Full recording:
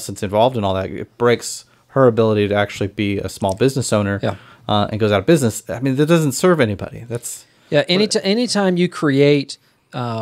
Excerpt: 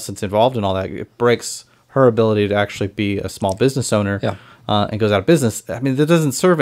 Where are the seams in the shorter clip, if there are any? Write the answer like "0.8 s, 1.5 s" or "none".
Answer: none

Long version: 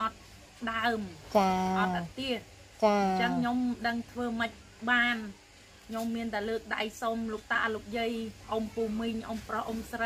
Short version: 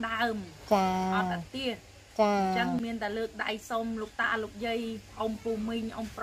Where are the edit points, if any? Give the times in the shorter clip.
2.8 s

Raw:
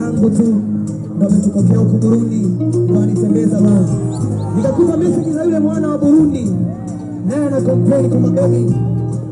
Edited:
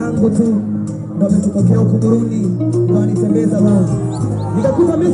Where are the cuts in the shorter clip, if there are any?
none

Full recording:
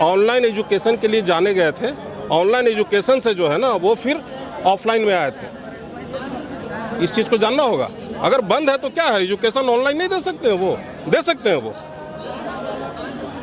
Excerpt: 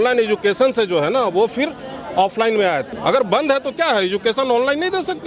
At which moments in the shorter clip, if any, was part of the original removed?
2.9 s

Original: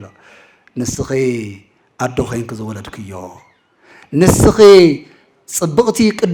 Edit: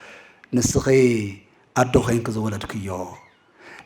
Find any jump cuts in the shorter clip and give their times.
none

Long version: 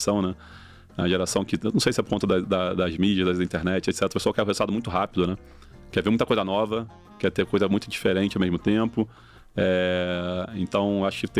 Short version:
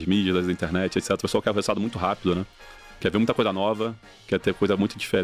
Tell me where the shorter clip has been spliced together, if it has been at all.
none

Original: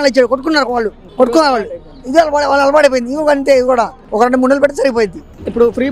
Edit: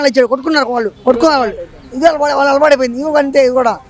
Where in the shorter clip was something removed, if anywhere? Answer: 0.9 s

